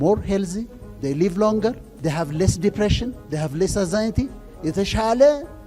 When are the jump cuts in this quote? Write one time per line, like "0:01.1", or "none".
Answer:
0:01.9